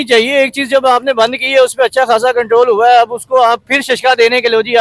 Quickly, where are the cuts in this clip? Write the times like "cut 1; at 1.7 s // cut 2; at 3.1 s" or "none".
none